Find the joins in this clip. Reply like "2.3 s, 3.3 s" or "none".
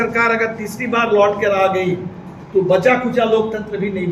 none